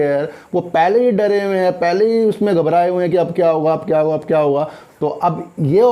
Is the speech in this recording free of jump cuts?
yes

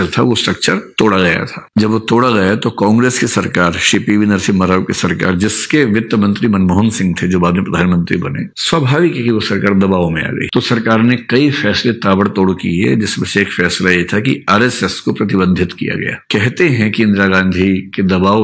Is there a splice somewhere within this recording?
yes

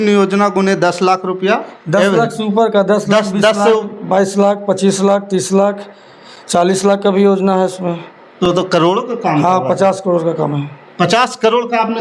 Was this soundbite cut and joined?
no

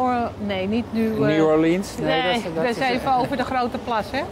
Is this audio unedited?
yes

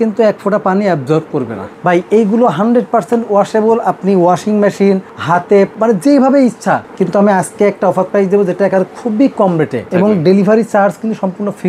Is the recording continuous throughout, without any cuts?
no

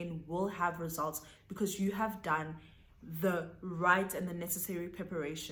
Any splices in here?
no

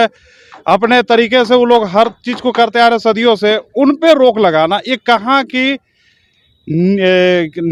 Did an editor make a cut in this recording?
no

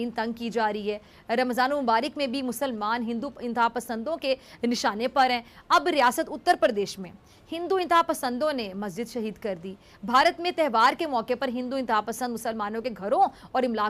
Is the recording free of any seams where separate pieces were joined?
yes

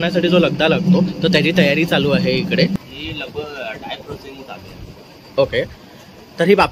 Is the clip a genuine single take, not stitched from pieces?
no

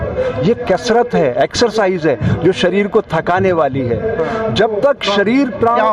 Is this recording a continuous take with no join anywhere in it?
yes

